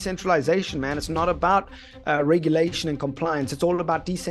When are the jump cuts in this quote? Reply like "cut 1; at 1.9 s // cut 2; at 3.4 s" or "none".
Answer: none